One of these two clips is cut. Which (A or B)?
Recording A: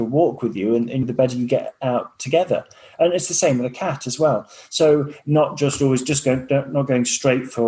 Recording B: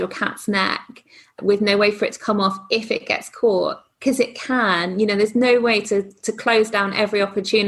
A